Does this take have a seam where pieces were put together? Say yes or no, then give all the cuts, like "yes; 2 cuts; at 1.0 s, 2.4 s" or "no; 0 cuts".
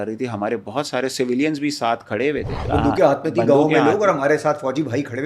yes; 1 cut; at 2.6 s